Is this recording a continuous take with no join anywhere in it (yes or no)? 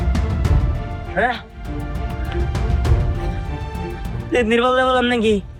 yes